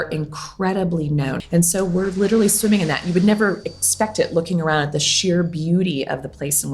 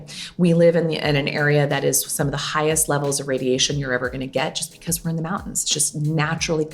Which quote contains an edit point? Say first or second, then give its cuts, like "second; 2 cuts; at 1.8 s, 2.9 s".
first; 1 cut; at 1.4 s